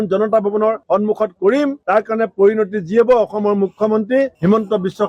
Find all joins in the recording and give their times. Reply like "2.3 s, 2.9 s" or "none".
none